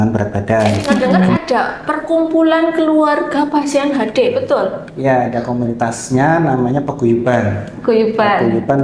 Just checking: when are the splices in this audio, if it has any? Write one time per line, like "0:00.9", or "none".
0:01.4